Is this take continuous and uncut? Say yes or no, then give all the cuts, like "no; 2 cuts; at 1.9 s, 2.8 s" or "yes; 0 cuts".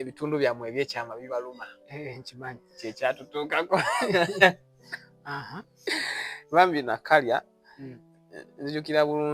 yes; 0 cuts